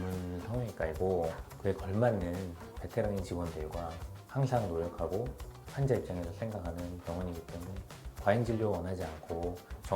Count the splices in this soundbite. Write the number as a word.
one